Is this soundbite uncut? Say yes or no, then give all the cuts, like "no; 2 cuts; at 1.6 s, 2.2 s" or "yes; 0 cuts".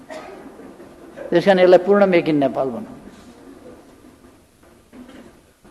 yes; 0 cuts